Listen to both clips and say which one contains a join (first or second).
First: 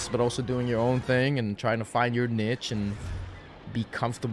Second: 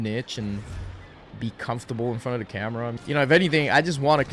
second